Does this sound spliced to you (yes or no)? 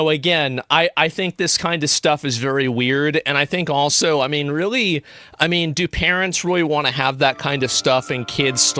no